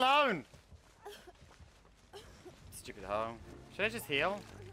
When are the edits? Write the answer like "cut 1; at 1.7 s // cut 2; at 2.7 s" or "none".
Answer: none